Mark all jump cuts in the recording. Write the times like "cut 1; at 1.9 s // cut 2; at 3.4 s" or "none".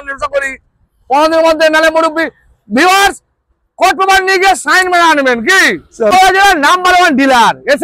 cut 1; at 6.1 s